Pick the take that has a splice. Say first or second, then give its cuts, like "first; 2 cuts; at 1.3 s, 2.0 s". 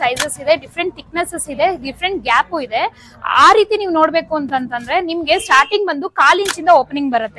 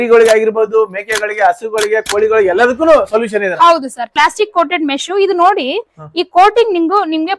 second; 1 cut; at 4.2 s